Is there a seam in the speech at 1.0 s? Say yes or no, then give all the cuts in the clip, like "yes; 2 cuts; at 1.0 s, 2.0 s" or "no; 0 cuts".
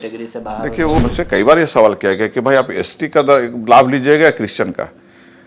yes; 1 cut; at 1.0 s